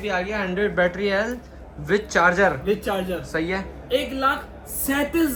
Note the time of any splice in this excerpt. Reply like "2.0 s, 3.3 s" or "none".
none